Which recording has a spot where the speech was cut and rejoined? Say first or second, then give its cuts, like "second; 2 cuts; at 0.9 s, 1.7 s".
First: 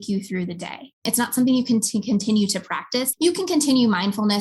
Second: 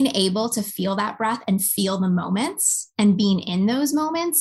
first; 2 cuts; at 1.0 s, 3.1 s